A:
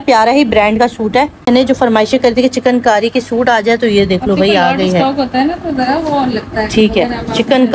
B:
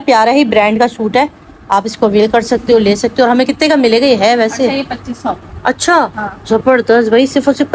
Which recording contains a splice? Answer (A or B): A